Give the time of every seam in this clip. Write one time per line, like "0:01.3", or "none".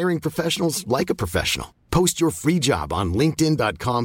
none